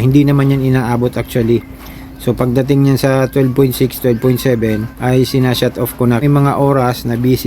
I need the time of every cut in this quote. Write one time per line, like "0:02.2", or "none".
0:04.9
0:06.2